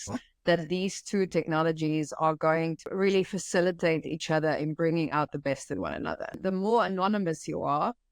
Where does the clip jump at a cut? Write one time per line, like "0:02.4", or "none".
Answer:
0:02.9
0:06.4